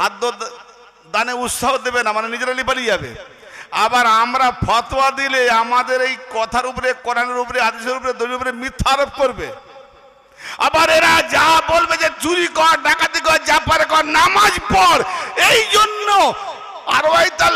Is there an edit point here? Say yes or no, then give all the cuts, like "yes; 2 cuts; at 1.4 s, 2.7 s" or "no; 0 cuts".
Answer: no; 0 cuts